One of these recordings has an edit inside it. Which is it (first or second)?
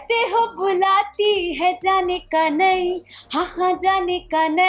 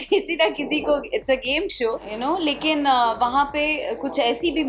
second